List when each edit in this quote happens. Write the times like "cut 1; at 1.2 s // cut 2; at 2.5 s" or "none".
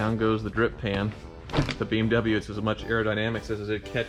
none